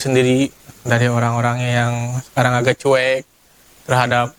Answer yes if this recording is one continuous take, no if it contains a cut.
yes